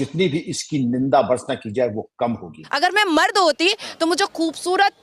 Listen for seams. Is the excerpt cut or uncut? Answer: cut